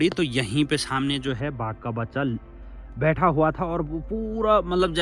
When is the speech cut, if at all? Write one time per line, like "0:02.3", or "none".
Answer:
none